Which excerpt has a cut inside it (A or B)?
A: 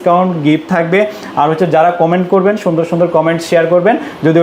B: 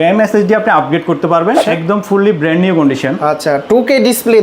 B